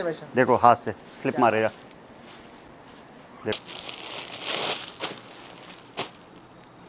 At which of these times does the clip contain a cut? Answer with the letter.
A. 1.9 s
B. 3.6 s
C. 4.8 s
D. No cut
B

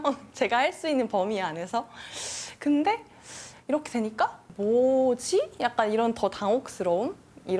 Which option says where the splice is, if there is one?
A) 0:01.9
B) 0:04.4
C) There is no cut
B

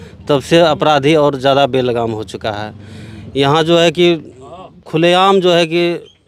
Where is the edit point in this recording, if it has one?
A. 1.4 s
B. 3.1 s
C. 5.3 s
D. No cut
D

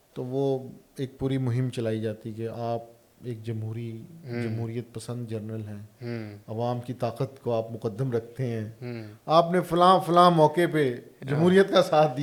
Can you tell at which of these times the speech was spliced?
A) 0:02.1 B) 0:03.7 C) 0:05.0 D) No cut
D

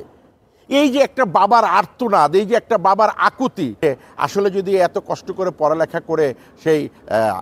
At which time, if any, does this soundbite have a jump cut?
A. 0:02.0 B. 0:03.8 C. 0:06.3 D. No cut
B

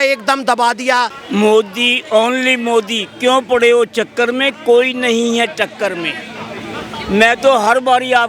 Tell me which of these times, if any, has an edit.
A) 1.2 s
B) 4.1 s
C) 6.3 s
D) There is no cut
A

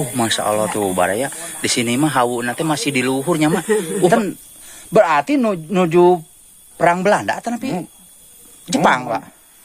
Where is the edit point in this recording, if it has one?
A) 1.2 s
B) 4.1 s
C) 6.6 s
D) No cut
B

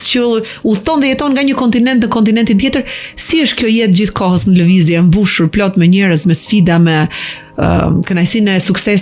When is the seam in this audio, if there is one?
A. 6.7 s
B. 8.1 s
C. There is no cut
C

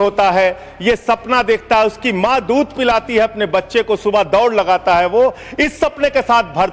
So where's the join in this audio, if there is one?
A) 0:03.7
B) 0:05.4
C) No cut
C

